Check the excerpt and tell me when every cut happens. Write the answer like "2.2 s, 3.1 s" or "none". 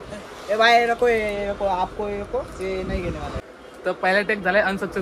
3.5 s